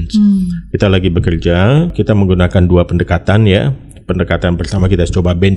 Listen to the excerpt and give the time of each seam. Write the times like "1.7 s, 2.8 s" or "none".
1.9 s